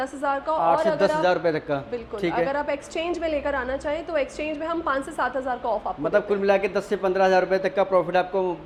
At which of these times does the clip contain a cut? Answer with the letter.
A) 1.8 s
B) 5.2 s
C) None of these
C